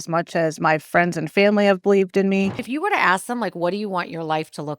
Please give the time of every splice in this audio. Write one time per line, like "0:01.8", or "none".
0:02.6